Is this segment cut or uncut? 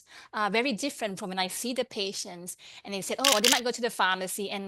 cut